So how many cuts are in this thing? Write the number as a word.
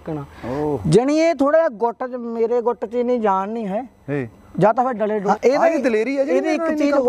one